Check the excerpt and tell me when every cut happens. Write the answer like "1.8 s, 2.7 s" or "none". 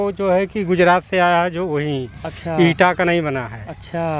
none